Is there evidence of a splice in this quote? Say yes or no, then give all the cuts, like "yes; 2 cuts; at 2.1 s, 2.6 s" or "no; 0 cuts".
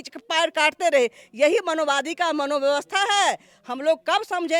no; 0 cuts